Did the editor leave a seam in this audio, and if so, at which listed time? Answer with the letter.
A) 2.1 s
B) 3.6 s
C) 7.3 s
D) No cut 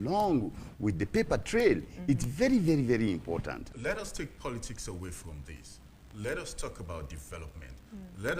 B